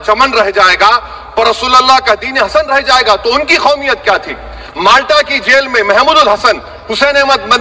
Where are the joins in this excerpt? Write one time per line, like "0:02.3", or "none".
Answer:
none